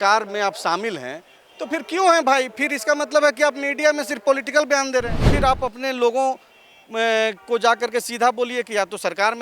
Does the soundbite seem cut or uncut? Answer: cut